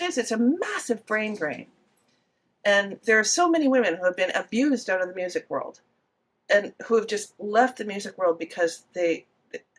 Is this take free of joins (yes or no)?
yes